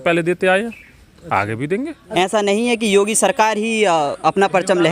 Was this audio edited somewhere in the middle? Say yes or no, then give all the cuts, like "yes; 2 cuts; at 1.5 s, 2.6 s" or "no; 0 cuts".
yes; 1 cut; at 2.0 s